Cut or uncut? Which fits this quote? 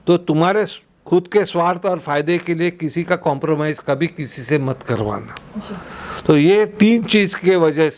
uncut